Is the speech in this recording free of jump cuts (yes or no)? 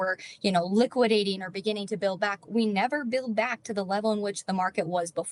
yes